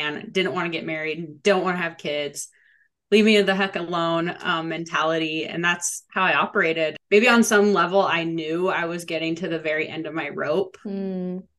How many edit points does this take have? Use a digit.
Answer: 1